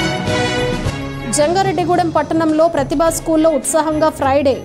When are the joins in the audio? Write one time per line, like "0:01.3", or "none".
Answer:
0:00.9

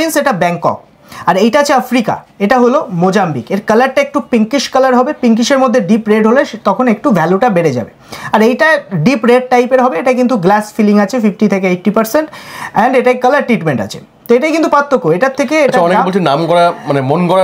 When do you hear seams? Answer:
none

